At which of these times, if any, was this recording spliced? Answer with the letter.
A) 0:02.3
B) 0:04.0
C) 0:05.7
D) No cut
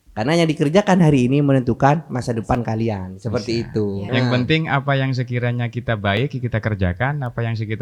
B